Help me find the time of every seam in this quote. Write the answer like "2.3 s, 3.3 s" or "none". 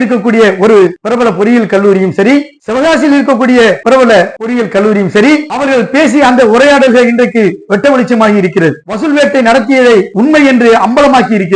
4.1 s, 5.5 s, 8.9 s, 10.1 s